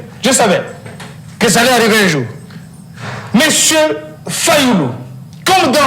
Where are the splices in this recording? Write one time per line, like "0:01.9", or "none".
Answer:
none